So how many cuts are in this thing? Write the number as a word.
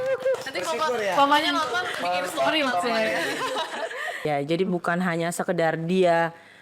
one